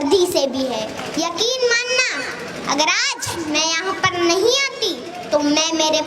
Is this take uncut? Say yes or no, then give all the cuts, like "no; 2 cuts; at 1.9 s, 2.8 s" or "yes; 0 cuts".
no; 1 cut; at 1.0 s